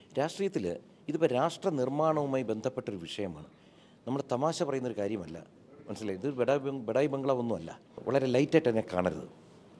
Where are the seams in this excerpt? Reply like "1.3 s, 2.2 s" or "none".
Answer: 8.0 s